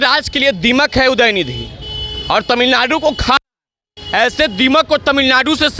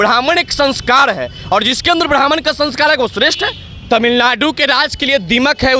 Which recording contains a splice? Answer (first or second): second